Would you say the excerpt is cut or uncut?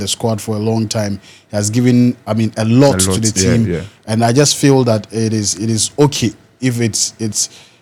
uncut